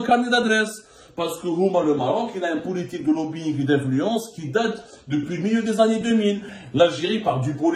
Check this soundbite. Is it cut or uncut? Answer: cut